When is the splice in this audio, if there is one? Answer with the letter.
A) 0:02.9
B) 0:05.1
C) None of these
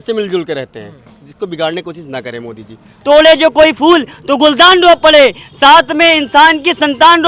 A